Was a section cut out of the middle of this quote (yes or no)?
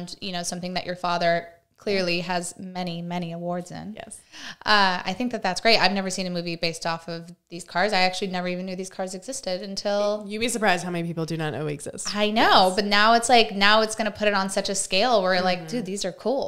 no